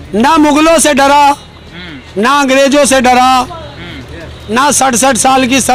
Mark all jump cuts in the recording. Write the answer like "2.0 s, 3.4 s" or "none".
none

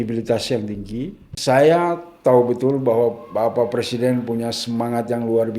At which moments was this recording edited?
1.2 s

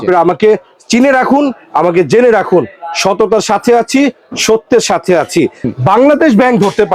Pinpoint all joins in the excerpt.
5.6 s

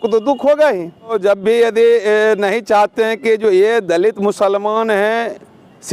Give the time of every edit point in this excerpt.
1.2 s

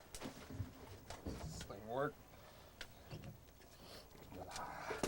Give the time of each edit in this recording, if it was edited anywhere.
4.2 s

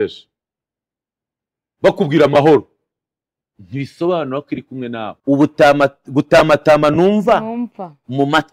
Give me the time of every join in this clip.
5.2 s

